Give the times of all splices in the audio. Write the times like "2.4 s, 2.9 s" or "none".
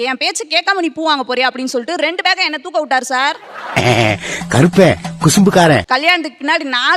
none